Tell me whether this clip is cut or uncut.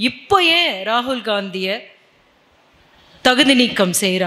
uncut